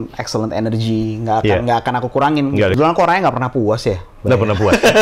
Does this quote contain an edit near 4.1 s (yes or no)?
no